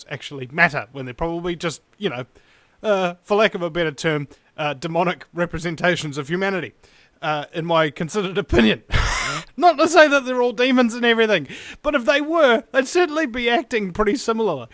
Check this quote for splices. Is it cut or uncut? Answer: cut